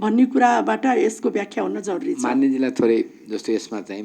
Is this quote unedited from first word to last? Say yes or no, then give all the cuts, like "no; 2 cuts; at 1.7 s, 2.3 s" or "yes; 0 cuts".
yes; 0 cuts